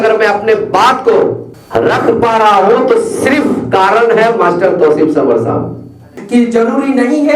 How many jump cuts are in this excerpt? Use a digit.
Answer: 2